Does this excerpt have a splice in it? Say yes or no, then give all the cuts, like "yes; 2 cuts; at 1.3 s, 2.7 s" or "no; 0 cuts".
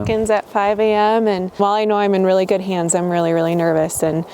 yes; 1 cut; at 1.6 s